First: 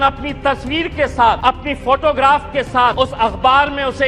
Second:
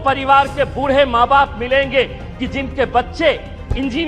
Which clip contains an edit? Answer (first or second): first